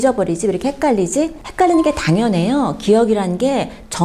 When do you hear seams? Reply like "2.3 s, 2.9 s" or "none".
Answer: 1.4 s